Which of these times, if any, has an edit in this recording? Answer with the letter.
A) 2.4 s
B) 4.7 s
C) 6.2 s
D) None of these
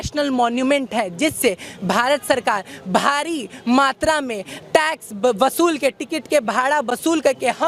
D